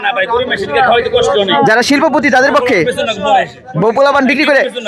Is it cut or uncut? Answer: uncut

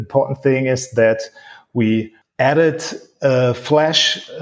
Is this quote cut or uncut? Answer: cut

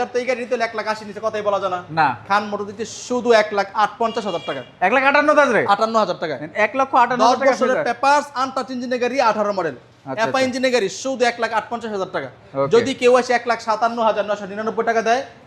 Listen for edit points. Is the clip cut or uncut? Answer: uncut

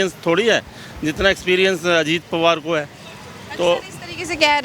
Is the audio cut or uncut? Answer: uncut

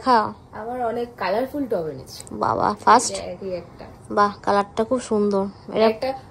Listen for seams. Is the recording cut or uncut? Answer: uncut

